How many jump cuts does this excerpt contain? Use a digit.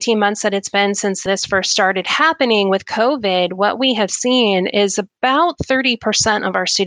1